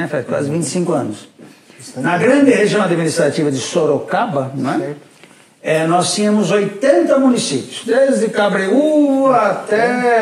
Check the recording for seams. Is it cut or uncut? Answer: uncut